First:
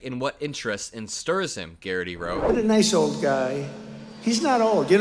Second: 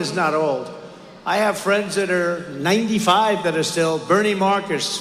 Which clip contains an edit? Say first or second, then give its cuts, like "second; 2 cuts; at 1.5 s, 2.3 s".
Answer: first; 1 cut; at 2.4 s